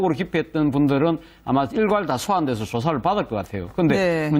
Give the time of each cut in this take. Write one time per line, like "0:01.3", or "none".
0:02.8